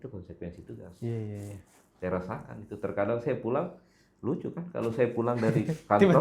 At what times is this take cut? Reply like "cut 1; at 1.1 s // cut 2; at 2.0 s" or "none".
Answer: none

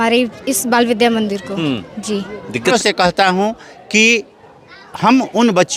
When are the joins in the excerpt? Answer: cut 1; at 2.7 s

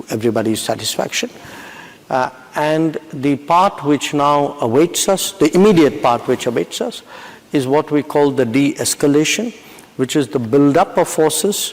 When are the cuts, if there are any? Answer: none

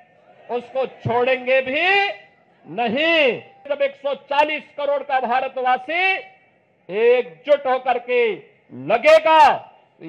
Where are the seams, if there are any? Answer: cut 1; at 3.7 s

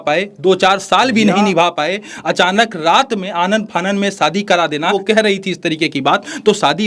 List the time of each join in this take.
cut 1; at 4.9 s

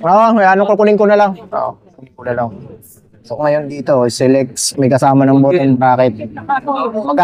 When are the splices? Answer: cut 1; at 3.4 s

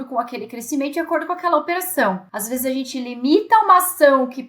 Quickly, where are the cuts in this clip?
cut 1; at 2.3 s

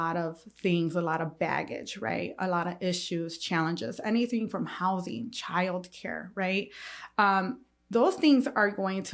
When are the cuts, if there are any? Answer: none

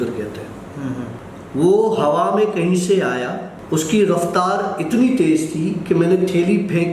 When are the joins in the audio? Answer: cut 1; at 1.2 s // cut 2; at 3.5 s

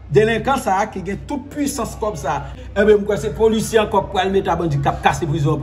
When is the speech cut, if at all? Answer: cut 1; at 2.5 s

